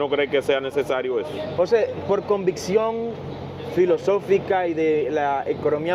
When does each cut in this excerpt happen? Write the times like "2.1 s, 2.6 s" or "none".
none